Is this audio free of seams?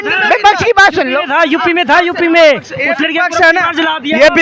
yes; 0 cuts

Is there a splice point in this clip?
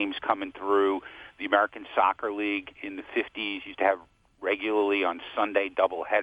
no; 0 cuts

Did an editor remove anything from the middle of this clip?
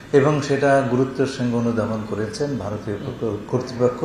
no; 0 cuts

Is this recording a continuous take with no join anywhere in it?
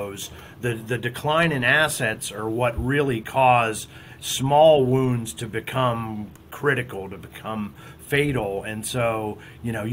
yes; 0 cuts

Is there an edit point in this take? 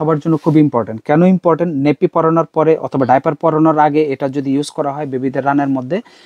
no; 0 cuts

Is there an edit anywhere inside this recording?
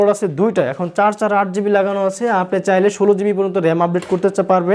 no; 0 cuts

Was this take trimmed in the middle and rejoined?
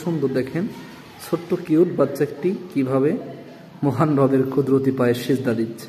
no; 0 cuts

